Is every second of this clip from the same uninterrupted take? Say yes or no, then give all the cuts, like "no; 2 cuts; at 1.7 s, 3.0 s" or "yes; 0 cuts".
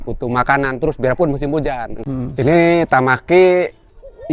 no; 1 cut; at 1.9 s